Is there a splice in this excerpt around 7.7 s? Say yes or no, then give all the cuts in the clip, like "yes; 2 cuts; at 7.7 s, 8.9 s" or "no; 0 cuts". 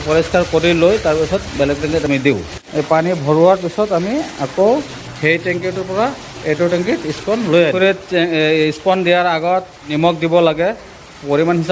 yes; 2 cuts; at 2.6 s, 7.7 s